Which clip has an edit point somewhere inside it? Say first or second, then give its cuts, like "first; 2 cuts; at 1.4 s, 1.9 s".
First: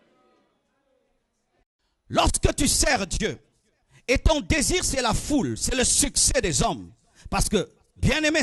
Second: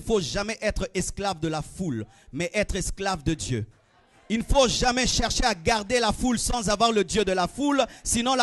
first; 1 cut; at 1.7 s